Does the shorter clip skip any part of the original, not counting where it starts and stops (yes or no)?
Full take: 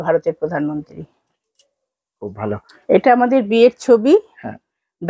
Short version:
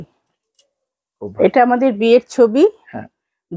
yes